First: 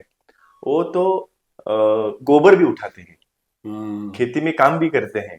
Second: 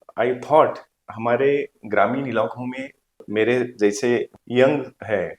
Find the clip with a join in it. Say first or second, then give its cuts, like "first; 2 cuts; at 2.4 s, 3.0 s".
second; 3 cuts; at 1.1 s, 3.2 s, 4.4 s